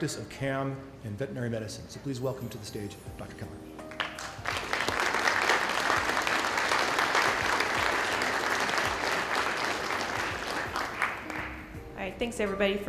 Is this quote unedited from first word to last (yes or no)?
no